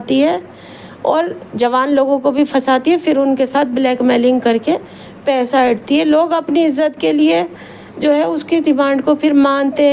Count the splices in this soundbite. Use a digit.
0